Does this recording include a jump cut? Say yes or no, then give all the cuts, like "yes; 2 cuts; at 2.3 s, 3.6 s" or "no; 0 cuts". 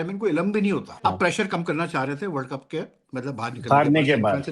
yes; 1 cut; at 1.0 s